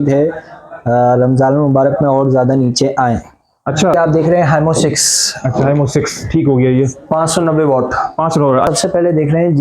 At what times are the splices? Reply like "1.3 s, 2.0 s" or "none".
3.9 s, 8.7 s